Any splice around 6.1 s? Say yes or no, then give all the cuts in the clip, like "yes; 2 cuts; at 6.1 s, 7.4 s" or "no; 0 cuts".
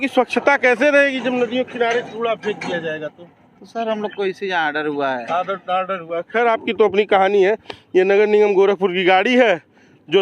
no; 0 cuts